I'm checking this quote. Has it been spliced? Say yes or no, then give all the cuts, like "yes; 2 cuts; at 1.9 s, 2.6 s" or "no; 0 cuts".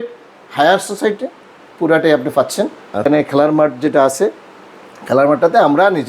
yes; 1 cut; at 3.1 s